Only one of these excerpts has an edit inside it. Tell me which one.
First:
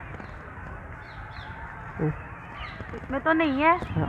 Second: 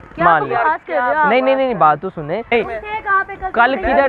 second; 1 cut; at 2.5 s

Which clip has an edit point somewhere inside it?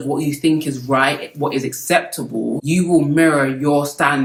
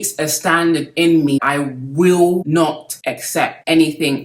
second; 1 cut; at 1.4 s

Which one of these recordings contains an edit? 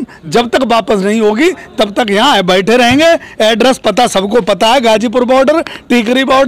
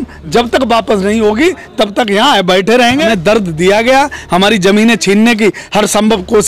second; 1 cut; at 3.1 s

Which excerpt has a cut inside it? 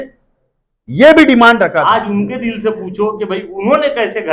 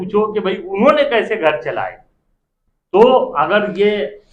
first; 1 cut; at 1.8 s

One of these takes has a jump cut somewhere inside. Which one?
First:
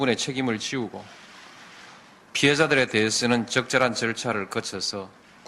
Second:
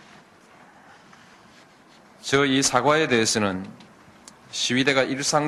first; 1 cut; at 4.2 s

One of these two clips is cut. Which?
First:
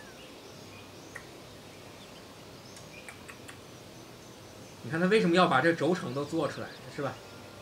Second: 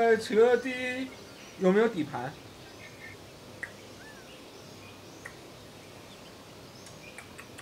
second; 1 cut; at 3.0 s

